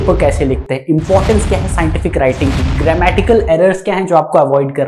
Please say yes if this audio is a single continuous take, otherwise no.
yes